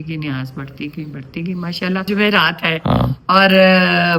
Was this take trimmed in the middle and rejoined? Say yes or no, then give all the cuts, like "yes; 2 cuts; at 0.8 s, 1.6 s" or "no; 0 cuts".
yes; 1 cut; at 2.1 s